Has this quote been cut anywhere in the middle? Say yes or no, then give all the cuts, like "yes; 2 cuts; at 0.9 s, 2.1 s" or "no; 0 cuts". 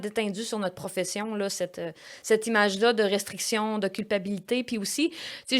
no; 0 cuts